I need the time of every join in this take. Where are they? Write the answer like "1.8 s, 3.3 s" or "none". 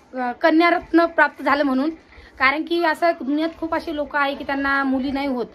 none